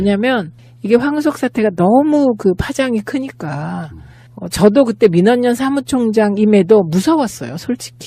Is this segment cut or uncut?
uncut